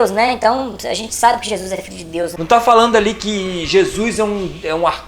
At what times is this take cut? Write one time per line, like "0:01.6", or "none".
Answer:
0:02.4